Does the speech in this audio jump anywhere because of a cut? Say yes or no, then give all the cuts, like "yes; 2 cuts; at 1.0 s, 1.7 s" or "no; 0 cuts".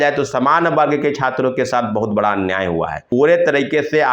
yes; 1 cut; at 3.0 s